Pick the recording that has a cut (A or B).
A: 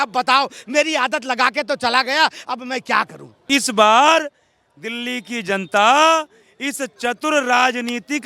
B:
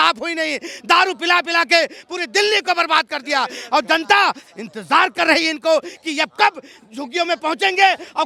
A